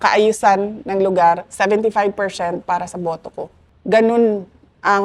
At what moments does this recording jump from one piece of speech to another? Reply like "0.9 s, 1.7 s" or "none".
3.6 s